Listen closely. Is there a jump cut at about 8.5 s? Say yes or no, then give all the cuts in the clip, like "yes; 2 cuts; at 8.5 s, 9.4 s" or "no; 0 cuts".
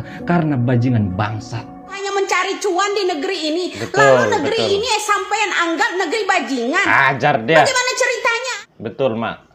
yes; 2 cuts; at 2.0 s, 8.5 s